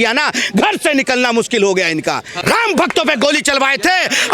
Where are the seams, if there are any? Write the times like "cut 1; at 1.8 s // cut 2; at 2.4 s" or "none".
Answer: cut 1; at 2.3 s